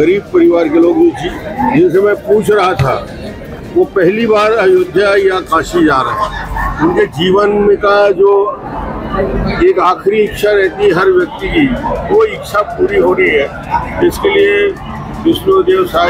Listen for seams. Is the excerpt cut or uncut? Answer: uncut